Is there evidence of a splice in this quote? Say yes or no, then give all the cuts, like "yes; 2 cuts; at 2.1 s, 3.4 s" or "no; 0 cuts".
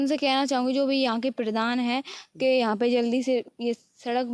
no; 0 cuts